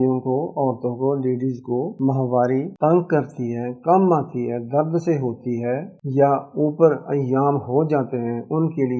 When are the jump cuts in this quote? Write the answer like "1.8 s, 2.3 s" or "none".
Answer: 1.9 s, 2.7 s